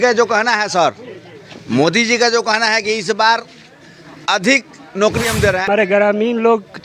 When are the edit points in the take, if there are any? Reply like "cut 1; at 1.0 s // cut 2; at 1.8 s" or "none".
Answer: cut 1; at 5.6 s